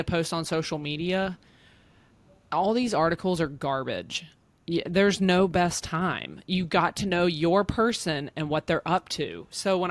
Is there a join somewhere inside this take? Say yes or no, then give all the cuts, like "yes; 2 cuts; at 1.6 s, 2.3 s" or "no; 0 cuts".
no; 0 cuts